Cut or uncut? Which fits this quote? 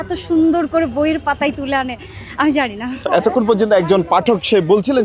uncut